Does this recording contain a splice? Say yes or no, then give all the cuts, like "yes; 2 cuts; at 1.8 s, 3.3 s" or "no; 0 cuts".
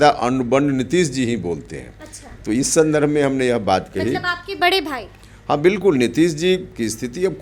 no; 0 cuts